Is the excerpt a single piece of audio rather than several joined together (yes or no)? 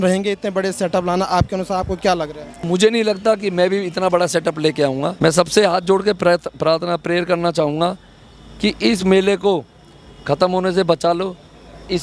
no